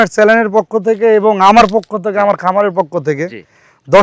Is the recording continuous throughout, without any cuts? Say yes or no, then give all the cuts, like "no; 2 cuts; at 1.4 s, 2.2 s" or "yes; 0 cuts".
yes; 0 cuts